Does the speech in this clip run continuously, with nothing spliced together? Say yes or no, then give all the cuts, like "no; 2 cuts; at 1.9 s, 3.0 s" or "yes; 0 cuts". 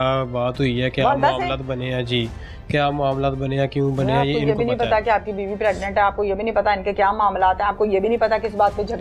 yes; 0 cuts